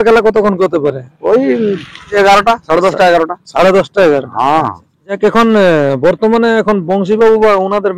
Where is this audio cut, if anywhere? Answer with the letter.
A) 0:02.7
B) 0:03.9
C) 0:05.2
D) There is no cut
C